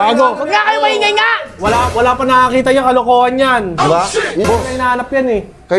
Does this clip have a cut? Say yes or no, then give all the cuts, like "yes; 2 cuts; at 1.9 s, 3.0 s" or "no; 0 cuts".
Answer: yes; 1 cut; at 4.4 s